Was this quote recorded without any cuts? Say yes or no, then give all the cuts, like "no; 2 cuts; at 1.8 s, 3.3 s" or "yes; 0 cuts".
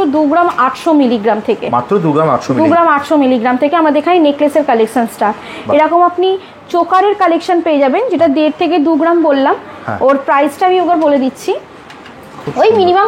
yes; 0 cuts